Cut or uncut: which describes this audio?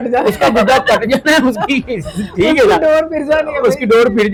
uncut